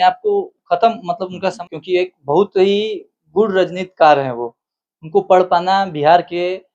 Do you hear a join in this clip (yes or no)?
yes